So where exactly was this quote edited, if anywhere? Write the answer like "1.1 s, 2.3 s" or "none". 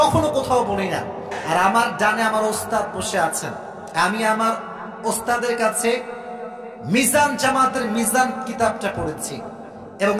1.3 s